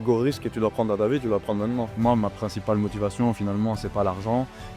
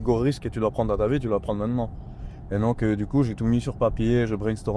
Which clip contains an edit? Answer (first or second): first